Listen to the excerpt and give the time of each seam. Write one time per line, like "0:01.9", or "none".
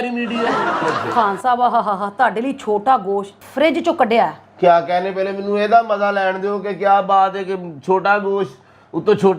0:01.0